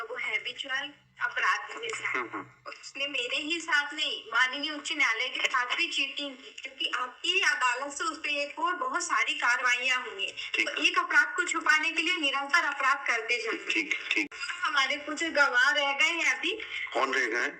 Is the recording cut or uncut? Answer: cut